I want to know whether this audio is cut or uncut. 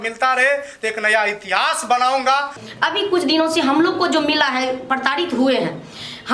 cut